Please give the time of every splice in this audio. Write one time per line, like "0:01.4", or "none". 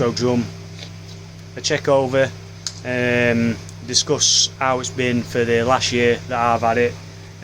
none